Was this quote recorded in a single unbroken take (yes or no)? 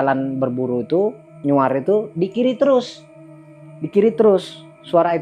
yes